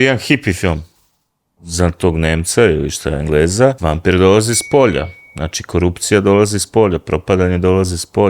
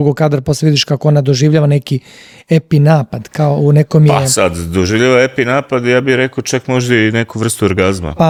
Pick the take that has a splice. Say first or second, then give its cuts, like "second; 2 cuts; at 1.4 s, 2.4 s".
first; 2 cuts; at 1.6 s, 3.8 s